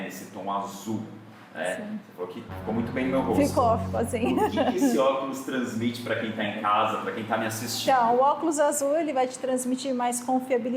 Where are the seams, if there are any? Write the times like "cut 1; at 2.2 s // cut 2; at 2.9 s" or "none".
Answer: none